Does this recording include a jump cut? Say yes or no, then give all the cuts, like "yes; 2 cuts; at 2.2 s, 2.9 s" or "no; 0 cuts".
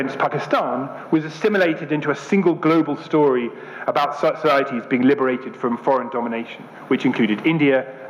no; 0 cuts